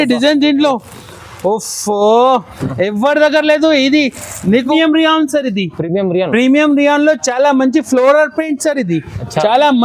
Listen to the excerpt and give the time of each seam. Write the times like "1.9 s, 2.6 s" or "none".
4.7 s